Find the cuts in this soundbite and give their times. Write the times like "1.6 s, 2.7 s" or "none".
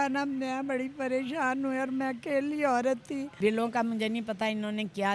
3.4 s